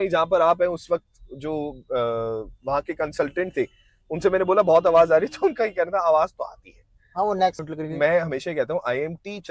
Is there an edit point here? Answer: yes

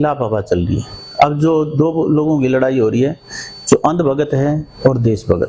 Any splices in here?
no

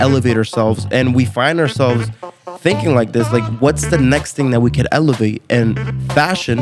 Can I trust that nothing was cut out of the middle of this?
yes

